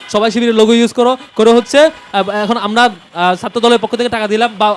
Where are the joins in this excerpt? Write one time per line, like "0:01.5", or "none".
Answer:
none